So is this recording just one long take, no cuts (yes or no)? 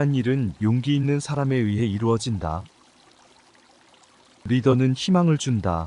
yes